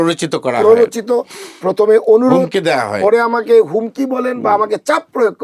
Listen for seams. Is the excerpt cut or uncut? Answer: uncut